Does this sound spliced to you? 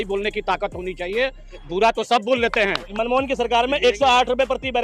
yes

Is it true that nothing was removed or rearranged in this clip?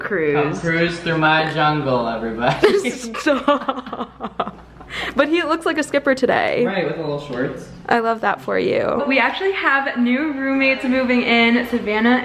yes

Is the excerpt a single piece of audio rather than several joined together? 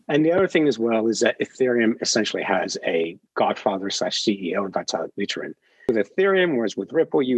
no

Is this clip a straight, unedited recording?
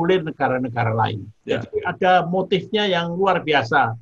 no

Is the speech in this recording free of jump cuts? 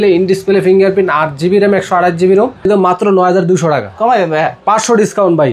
no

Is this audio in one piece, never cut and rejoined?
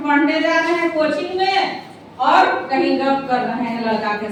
yes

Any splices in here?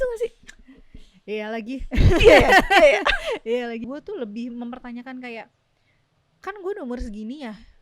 yes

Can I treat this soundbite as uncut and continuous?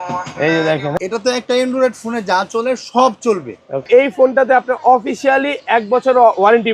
no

